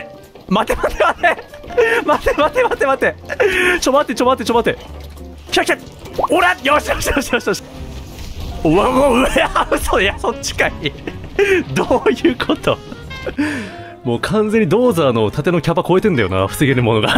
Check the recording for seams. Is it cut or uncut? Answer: cut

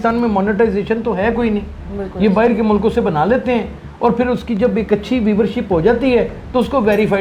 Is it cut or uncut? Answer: uncut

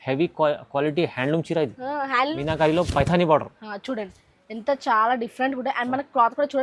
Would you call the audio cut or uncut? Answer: cut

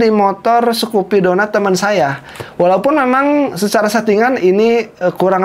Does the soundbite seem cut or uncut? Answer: uncut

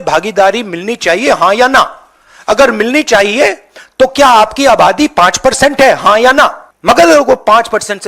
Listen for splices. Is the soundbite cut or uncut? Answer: cut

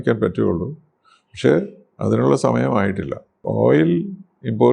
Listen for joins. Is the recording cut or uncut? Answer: cut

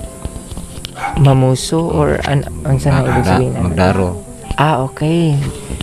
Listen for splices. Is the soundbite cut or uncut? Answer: uncut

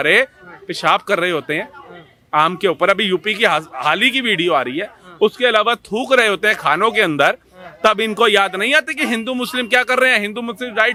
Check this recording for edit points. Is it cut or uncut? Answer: uncut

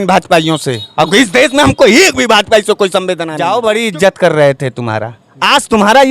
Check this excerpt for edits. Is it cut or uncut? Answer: cut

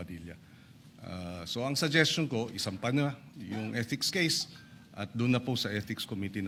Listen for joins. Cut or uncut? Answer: uncut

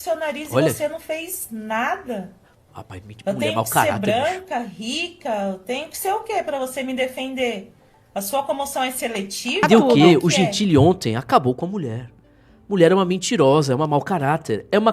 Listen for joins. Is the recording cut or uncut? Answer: cut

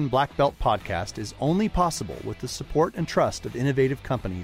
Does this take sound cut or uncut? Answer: uncut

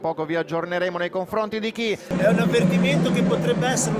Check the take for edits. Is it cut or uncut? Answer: cut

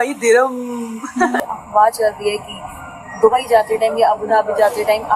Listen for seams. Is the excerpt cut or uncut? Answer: cut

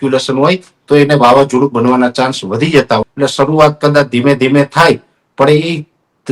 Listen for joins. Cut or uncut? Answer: cut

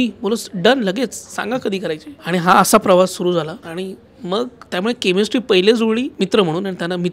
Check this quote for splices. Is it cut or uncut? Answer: cut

